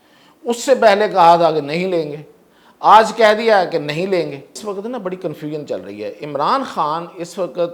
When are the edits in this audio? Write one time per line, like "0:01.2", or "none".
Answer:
0:04.6